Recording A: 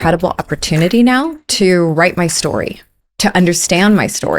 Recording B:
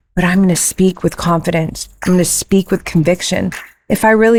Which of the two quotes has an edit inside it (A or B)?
A